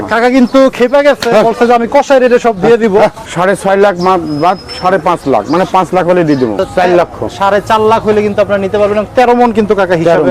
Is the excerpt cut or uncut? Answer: cut